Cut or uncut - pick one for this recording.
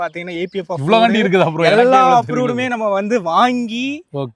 uncut